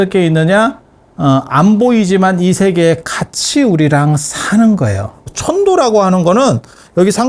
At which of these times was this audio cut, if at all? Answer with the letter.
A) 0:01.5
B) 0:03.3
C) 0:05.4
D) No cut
C